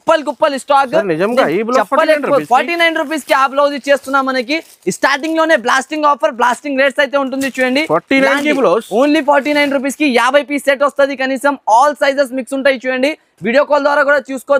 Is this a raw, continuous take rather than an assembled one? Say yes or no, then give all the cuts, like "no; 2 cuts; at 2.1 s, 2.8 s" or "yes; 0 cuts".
yes; 0 cuts